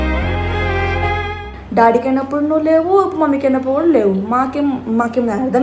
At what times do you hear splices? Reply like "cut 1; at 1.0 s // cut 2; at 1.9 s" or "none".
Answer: cut 1; at 1.5 s